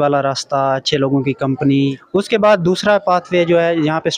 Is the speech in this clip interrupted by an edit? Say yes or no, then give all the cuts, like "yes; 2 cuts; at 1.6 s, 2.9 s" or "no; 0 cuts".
yes; 1 cut; at 2.0 s